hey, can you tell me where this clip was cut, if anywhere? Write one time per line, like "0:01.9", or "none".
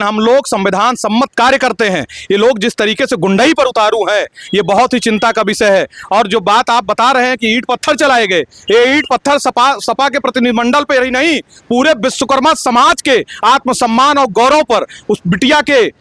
none